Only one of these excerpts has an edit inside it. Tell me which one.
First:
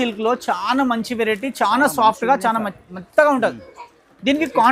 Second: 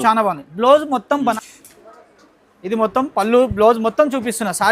second; 1 cut; at 1.4 s

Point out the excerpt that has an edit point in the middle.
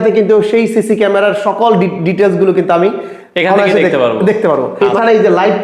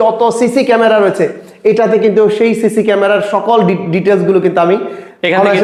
first; 1 cut; at 4.7 s

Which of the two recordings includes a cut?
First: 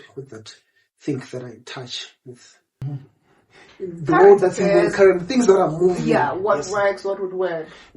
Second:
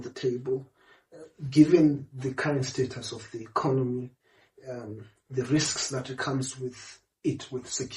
first; 1 cut; at 2.8 s

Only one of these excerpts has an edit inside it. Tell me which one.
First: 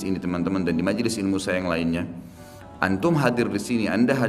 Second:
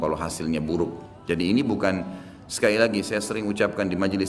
second; 1 cut; at 1.1 s

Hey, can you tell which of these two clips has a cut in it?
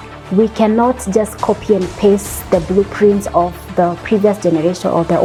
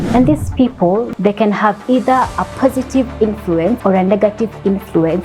second; 2 cuts; at 1.1 s, 3.8 s

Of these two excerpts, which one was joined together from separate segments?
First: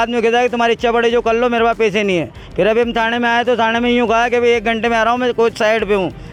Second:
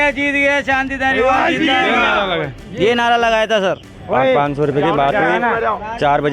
second; 1 cut; at 4.0 s

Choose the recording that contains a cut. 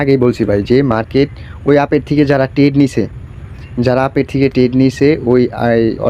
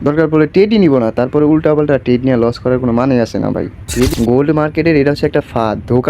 second; 1 cut; at 4.1 s

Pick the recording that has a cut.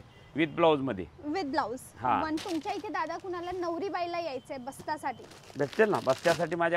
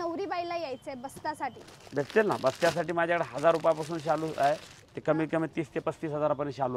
first; 1 cut; at 2.4 s

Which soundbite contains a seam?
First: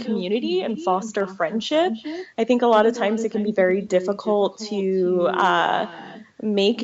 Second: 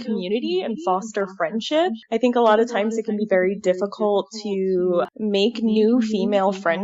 second; 2 cuts; at 2.0 s, 5.1 s

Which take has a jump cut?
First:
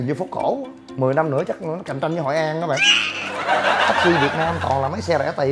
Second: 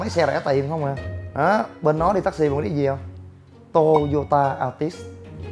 first; 1 cut; at 4.0 s

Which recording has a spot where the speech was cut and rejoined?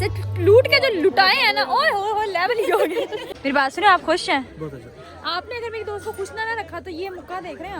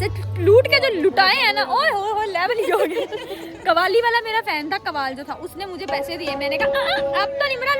first; 1 cut; at 3.3 s

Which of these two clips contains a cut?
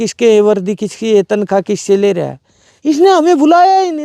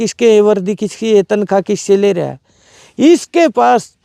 first; 1 cut; at 2.6 s

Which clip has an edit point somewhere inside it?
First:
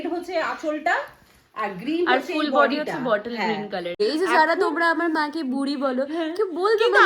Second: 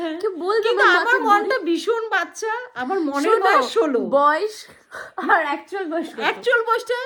first; 1 cut; at 4.0 s

